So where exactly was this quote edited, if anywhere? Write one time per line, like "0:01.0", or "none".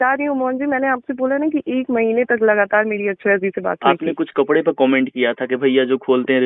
0:03.8

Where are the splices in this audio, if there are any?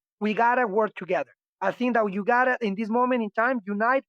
none

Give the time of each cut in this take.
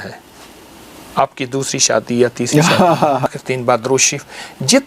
0:03.3

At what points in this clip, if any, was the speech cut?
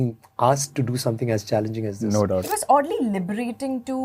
0:02.4

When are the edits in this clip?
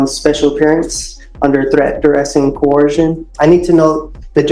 0:03.3

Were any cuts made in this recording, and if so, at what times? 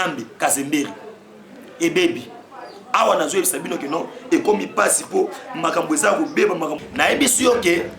0:06.7

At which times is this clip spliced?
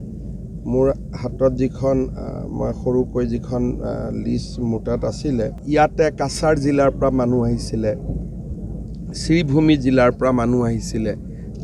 0:05.6

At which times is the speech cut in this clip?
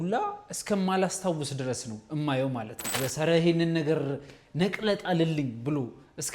0:03.0

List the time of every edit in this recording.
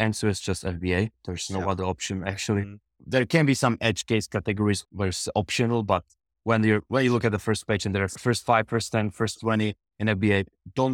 0:04.8
0:08.1

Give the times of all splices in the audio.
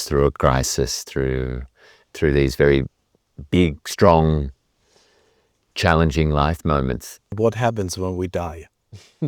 0:07.3

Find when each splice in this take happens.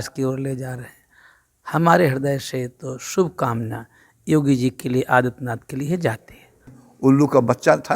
0:06.8

